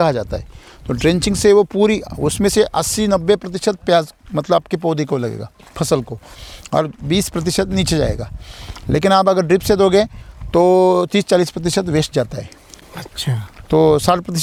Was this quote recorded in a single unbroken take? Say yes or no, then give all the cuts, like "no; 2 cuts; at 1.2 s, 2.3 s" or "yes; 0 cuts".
yes; 0 cuts